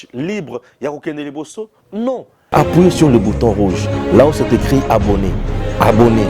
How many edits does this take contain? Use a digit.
1